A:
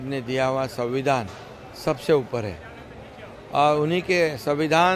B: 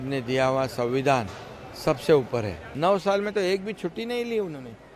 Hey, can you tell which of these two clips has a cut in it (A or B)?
B